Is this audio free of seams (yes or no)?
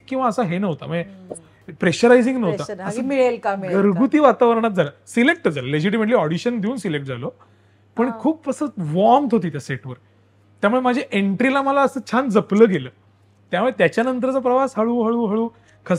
yes